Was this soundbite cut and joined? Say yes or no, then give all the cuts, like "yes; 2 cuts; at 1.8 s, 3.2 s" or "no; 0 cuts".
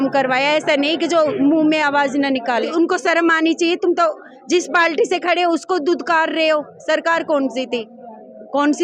yes; 1 cut; at 2.7 s